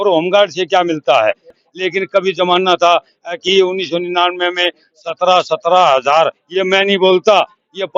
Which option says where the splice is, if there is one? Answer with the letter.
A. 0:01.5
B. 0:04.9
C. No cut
C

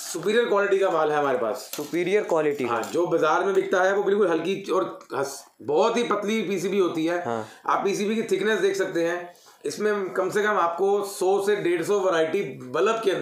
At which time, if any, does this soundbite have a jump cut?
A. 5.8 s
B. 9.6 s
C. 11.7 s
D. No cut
D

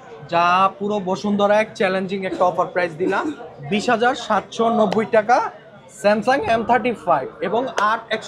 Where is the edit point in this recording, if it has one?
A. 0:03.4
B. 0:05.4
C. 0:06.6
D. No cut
D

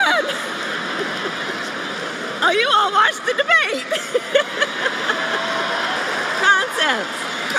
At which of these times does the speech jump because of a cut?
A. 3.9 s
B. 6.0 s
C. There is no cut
B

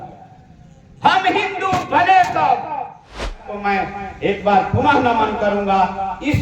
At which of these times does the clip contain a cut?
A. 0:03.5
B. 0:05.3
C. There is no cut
A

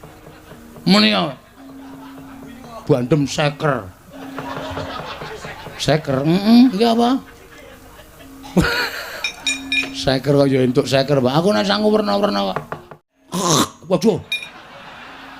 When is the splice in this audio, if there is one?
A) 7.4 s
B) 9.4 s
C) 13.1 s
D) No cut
C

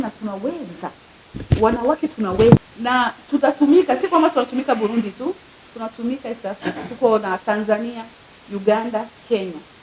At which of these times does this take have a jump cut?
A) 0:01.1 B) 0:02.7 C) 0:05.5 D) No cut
B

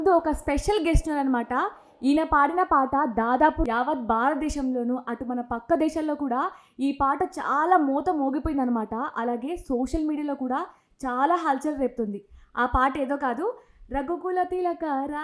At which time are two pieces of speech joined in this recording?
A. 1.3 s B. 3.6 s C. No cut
B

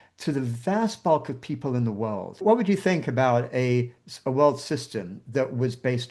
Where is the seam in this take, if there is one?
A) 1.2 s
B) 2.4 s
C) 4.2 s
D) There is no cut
B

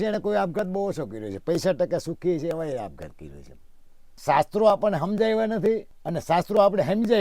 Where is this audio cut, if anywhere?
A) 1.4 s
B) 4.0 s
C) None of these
B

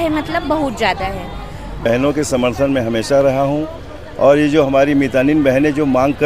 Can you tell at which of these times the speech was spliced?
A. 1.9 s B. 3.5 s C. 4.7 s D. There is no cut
A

